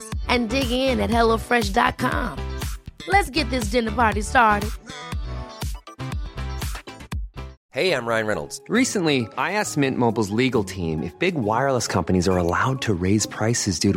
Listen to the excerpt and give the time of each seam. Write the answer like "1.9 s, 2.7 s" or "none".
7.6 s